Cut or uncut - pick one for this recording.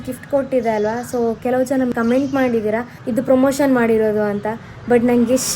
cut